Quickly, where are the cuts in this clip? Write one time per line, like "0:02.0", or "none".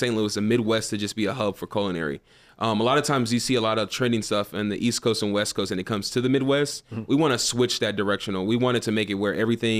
none